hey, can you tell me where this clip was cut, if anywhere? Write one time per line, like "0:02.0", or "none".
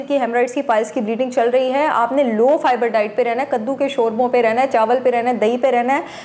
none